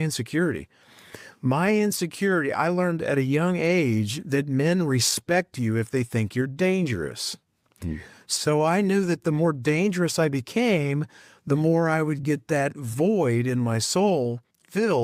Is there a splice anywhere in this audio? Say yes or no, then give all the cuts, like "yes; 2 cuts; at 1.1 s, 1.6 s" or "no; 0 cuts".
no; 0 cuts